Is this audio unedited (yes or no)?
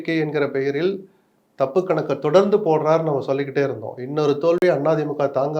yes